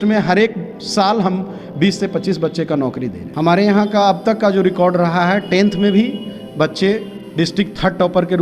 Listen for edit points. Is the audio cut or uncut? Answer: cut